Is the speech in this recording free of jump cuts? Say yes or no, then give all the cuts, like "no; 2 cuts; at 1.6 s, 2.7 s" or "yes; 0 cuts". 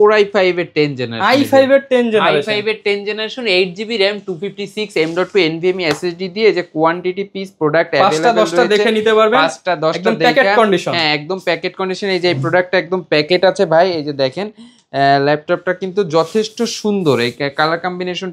yes; 0 cuts